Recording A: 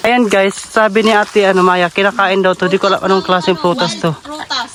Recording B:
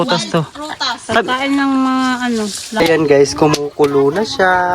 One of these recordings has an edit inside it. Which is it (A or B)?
B